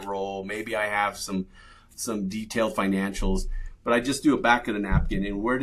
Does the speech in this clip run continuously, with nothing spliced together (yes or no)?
yes